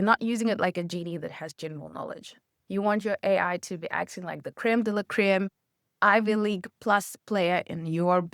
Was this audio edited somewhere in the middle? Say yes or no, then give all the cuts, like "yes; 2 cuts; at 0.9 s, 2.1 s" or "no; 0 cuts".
yes; 1 cut; at 2.5 s